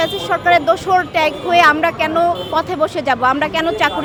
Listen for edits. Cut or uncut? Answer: uncut